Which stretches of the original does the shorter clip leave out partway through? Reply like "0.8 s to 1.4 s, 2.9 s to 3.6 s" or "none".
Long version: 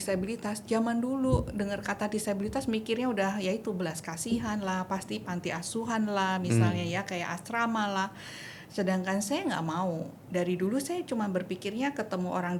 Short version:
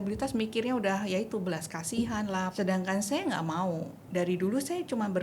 4.8 s to 8.7 s